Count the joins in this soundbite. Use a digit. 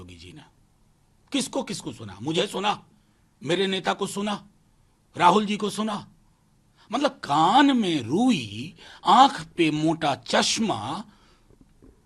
0